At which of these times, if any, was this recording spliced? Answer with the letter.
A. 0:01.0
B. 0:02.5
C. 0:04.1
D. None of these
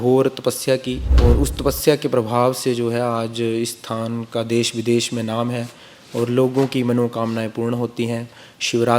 A